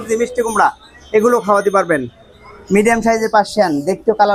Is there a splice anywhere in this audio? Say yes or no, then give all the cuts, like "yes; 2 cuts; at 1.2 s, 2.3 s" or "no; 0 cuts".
no; 0 cuts